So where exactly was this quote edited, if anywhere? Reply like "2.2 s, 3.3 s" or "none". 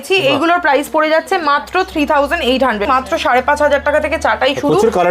2.8 s